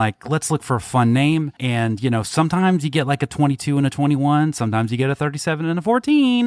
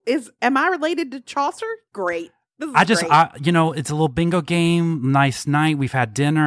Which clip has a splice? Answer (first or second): first